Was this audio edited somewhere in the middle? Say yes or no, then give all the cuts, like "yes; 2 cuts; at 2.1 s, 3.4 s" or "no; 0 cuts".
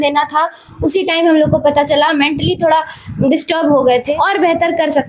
yes; 1 cut; at 4.1 s